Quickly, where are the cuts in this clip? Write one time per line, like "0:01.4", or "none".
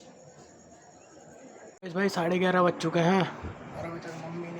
0:01.8

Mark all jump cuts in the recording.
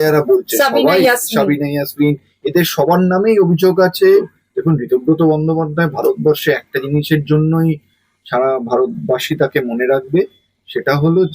0:04.4

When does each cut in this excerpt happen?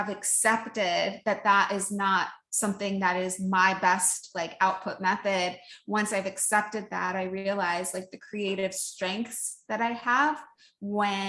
none

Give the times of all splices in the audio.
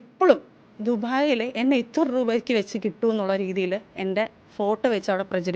none

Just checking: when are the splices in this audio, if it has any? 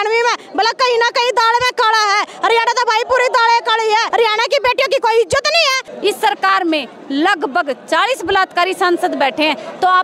0:04.1
0:05.8

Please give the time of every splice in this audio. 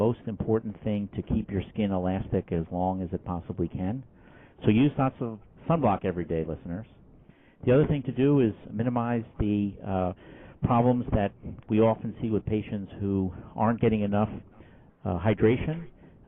none

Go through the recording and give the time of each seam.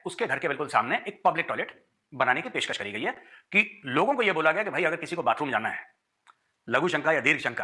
none

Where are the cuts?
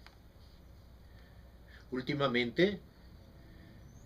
0:02.9

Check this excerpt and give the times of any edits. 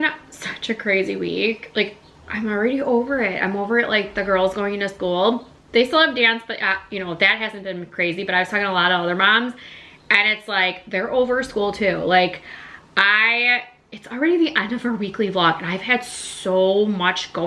none

